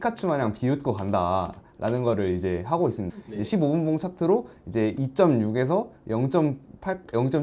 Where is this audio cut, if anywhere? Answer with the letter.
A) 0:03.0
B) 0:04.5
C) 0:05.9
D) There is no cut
A